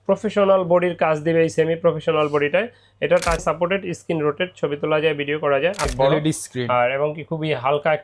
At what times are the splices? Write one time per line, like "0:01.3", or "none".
0:03.4
0:05.9